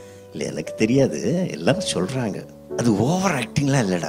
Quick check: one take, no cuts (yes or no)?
no